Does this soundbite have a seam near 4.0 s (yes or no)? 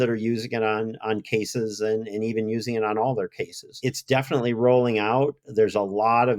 yes